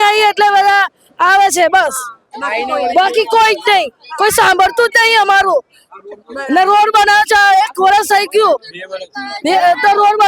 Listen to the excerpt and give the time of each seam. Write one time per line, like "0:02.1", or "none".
none